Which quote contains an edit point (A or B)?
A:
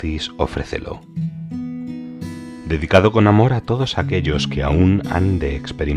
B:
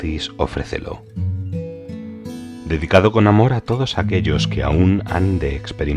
B